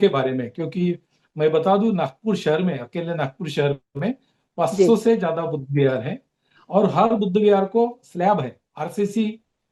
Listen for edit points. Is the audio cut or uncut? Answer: uncut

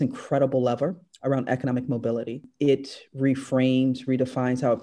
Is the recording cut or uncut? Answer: cut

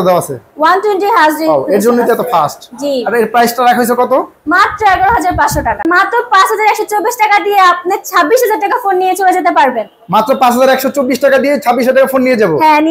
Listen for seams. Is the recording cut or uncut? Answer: cut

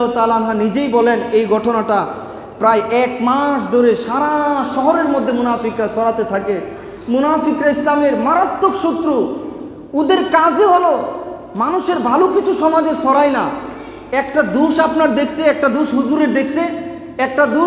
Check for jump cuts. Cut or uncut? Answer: uncut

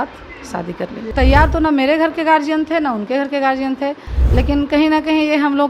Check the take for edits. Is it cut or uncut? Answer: cut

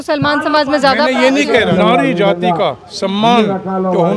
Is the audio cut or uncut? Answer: cut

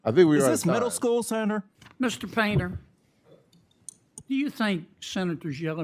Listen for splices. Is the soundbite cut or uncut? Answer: cut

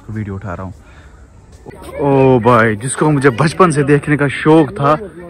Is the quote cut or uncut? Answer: cut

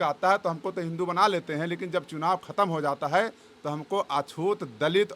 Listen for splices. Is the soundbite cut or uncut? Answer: uncut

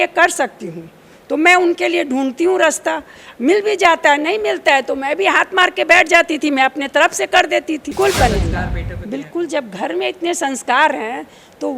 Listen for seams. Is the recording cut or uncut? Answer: cut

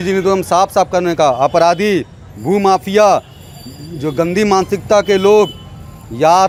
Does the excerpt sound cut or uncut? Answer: uncut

